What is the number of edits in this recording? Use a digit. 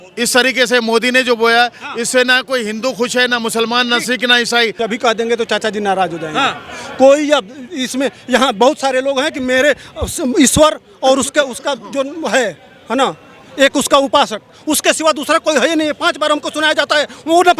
1